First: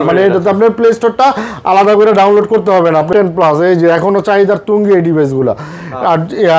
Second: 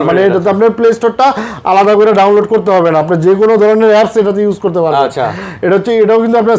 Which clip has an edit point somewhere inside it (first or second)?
first